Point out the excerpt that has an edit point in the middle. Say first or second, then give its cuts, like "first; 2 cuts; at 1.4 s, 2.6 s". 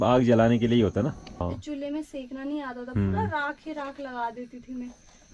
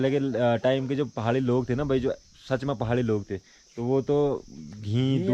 first; 1 cut; at 1.4 s